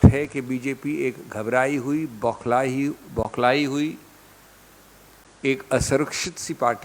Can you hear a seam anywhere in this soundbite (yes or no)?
no